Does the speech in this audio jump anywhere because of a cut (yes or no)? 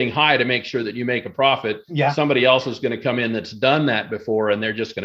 no